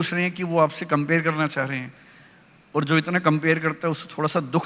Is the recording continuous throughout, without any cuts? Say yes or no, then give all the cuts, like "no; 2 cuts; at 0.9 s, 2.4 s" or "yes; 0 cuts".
yes; 0 cuts